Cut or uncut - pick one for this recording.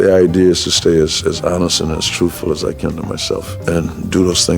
cut